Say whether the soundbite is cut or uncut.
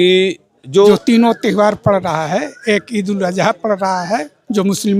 cut